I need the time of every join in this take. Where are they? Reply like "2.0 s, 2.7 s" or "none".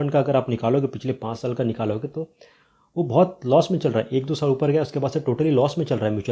none